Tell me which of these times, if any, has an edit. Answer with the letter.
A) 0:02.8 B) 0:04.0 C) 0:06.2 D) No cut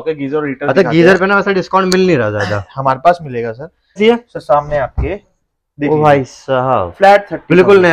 B